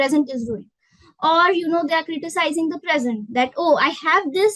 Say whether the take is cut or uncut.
uncut